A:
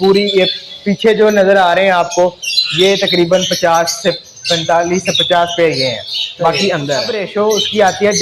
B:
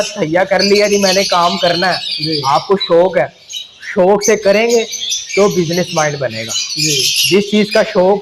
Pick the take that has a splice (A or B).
A